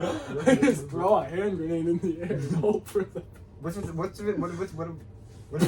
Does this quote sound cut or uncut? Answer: uncut